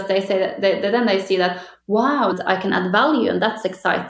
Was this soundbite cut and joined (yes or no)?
yes